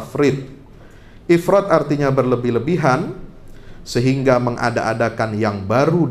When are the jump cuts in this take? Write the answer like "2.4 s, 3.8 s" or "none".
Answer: none